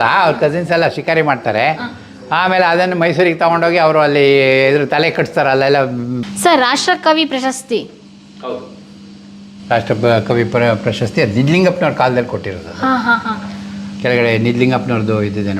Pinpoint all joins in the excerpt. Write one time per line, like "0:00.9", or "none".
0:06.2